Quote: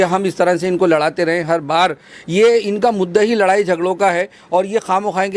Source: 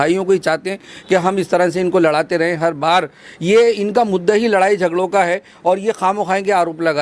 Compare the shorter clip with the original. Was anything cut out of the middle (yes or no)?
no